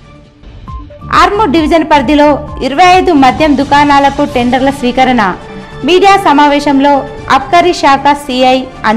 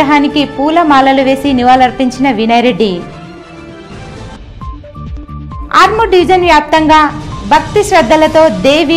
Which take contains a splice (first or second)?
first